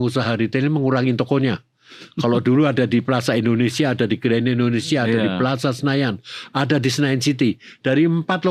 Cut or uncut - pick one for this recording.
uncut